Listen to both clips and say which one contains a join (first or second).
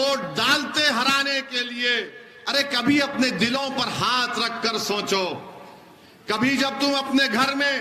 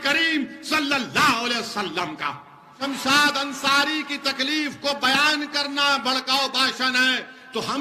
second